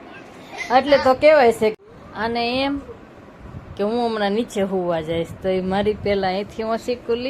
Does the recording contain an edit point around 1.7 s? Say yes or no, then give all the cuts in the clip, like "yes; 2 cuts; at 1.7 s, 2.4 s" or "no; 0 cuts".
yes; 1 cut; at 1.7 s